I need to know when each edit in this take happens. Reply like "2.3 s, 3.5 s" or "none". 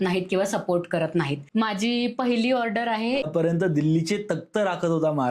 1.4 s, 3.3 s